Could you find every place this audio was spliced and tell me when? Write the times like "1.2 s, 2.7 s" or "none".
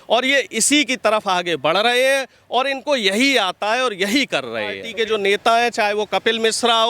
4.8 s

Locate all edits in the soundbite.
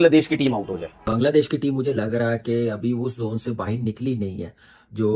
none

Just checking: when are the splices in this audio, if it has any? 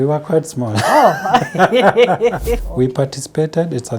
2.6 s

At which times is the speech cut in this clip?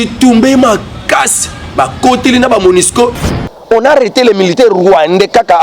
3.3 s

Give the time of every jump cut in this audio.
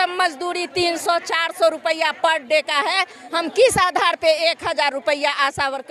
none

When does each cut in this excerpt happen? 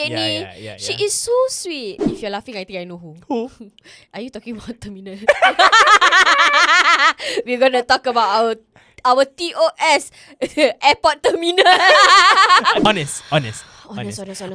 2.0 s, 12.8 s

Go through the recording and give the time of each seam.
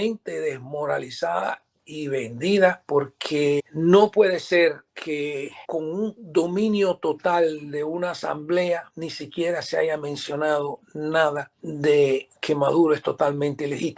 none

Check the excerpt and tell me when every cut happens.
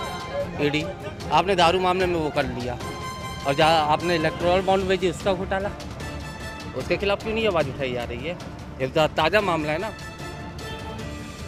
none

